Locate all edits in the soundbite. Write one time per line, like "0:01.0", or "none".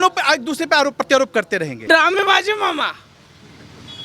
0:01.8